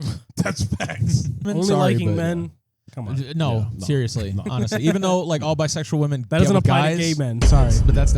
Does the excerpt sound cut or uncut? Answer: cut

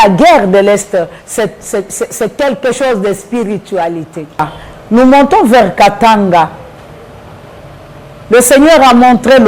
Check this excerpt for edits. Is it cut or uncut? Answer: uncut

